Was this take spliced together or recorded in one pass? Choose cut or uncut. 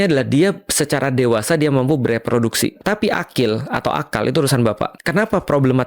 cut